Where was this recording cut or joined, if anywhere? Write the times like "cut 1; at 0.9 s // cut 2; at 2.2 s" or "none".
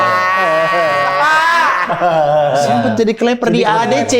cut 1; at 2.8 s